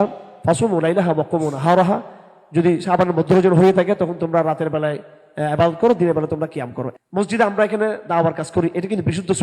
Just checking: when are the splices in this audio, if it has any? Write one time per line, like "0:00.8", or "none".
0:06.8